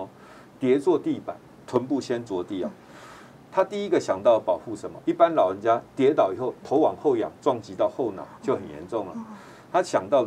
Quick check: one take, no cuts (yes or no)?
no